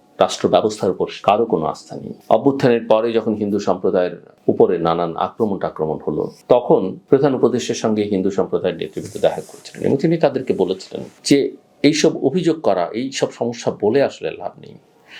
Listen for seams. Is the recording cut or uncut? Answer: cut